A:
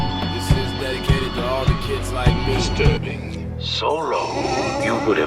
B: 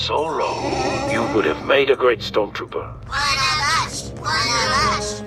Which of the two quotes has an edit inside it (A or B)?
A